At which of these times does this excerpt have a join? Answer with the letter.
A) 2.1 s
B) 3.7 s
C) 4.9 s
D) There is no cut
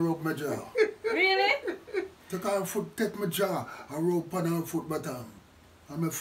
D